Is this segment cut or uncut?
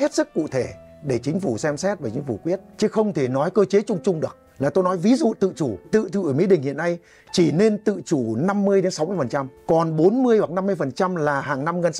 cut